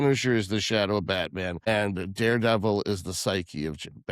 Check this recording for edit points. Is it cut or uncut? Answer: cut